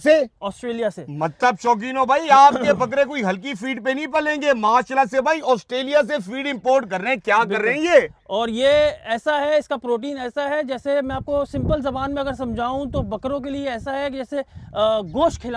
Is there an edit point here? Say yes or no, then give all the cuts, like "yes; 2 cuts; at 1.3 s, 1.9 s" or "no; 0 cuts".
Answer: no; 0 cuts